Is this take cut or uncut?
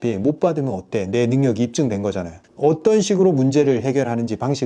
uncut